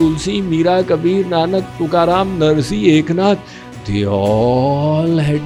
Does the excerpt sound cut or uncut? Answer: uncut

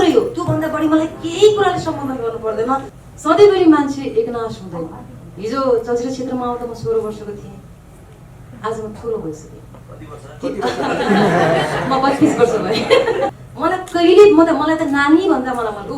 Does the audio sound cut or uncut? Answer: cut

